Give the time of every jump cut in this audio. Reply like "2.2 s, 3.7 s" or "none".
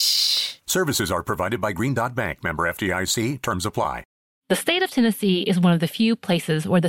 4.1 s